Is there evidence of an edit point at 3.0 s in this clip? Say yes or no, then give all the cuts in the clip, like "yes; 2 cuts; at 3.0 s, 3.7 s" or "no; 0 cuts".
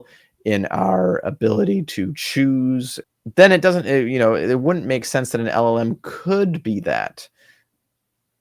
yes; 1 cut; at 3.0 s